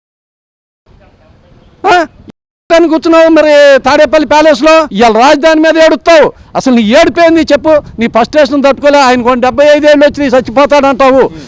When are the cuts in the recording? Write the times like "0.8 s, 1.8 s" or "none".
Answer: 4.9 s